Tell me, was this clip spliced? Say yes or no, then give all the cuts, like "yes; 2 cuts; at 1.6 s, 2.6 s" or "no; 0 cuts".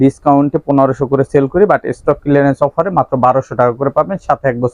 no; 0 cuts